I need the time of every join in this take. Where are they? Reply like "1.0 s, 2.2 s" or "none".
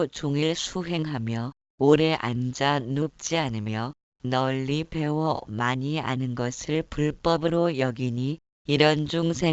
8.1 s